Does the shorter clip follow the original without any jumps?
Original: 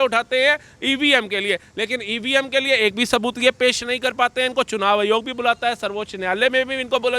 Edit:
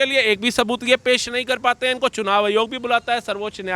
yes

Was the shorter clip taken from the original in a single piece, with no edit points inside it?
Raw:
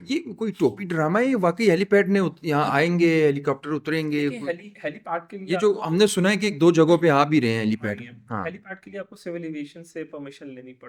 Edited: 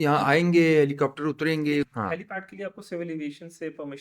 no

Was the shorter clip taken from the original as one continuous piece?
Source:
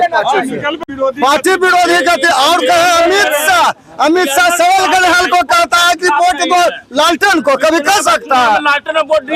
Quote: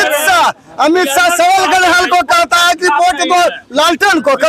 yes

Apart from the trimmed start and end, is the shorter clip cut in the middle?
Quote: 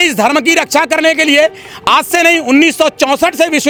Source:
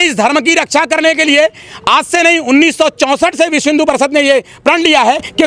no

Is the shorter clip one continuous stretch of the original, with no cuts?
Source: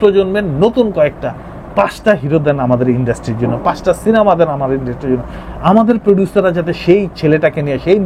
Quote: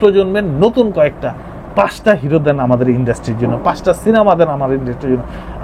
yes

